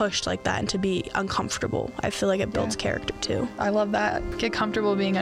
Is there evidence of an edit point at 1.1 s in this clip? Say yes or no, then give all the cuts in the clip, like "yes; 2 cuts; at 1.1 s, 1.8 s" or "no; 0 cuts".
no; 2 cuts; at 3.5 s, 4.3 s